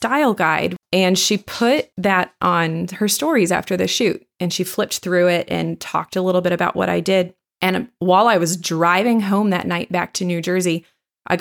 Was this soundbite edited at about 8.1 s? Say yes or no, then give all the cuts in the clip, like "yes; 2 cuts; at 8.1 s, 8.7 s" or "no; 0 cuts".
no; 2 cuts; at 0.8 s, 1.9 s